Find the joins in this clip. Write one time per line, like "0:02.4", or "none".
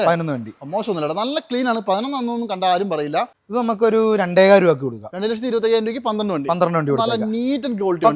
0:03.4